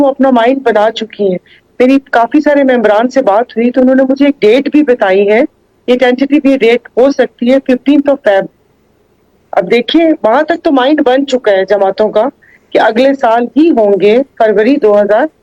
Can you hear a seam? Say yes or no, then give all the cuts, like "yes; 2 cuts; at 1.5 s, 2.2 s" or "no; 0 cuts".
no; 0 cuts